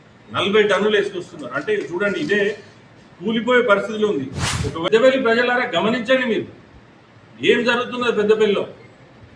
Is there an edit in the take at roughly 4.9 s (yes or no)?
yes